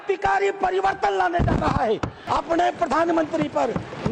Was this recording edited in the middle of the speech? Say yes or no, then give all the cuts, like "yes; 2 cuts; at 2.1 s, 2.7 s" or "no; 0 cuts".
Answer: yes; 1 cut; at 2.1 s